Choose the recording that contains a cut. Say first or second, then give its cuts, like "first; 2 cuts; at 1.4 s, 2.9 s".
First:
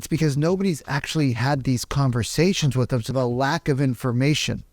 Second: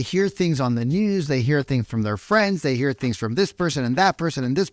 first; 1 cut; at 3.1 s